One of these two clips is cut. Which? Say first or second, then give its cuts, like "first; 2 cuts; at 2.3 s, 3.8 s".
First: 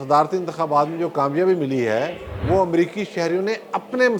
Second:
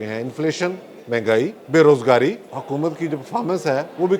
second; 2 cuts; at 1.6 s, 2.5 s